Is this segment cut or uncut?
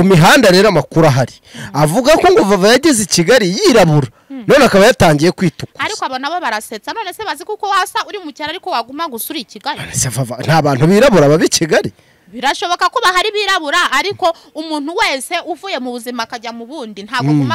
uncut